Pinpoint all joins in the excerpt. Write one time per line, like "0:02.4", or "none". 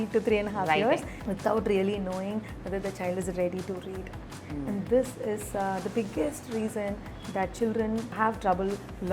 0:01.2
0:08.1